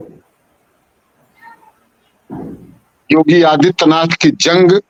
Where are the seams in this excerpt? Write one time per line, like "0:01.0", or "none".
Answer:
none